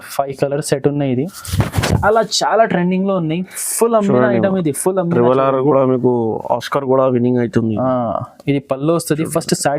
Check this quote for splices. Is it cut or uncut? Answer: cut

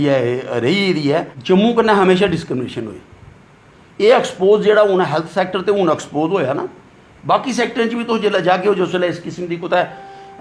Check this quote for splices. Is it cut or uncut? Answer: cut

